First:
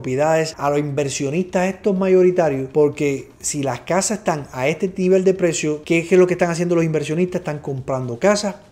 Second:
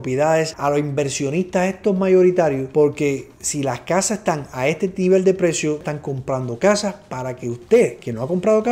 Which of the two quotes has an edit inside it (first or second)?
second